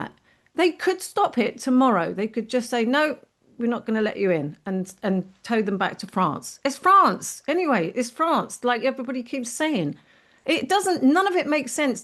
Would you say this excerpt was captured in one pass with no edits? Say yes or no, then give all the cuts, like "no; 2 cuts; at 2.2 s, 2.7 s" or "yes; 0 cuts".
yes; 0 cuts